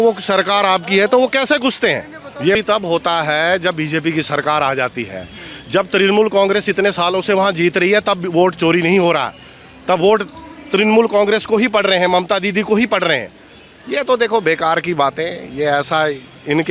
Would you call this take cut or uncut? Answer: cut